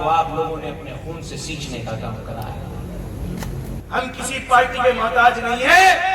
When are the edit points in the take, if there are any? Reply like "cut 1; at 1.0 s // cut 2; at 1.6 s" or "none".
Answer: cut 1; at 3.8 s

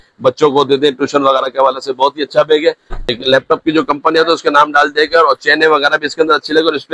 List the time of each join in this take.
cut 1; at 2.9 s

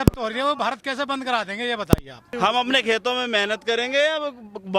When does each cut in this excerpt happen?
cut 1; at 2.3 s

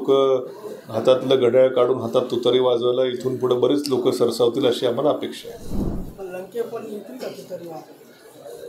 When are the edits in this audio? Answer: none

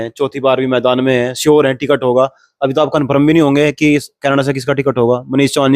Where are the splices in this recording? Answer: none

